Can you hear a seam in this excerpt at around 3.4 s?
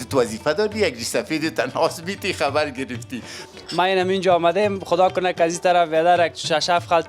yes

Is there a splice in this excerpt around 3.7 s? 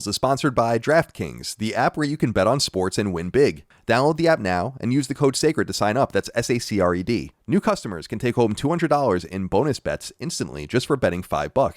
yes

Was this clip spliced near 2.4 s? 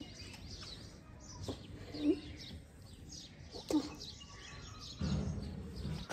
no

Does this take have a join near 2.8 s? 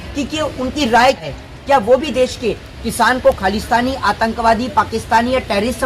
no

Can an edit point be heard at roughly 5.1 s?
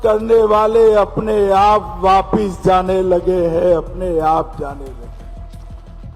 yes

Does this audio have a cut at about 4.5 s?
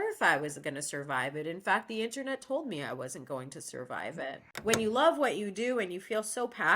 yes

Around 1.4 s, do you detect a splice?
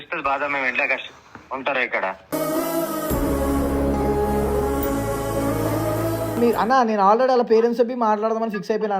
no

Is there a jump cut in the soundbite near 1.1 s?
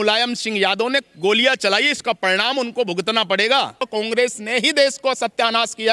no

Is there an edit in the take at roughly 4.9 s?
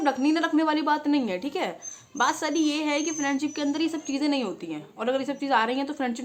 no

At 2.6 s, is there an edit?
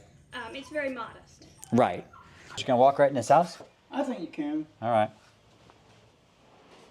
yes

